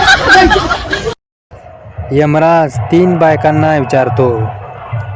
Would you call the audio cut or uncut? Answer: cut